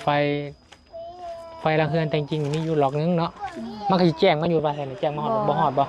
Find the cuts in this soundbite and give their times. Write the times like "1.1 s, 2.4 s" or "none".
none